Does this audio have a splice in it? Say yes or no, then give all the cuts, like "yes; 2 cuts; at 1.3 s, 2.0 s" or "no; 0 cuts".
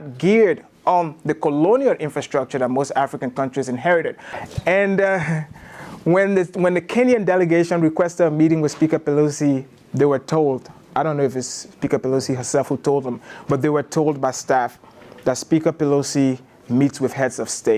yes; 1 cut; at 4.3 s